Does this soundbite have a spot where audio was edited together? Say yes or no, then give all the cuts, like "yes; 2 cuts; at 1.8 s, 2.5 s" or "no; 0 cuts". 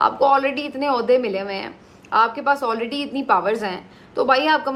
no; 0 cuts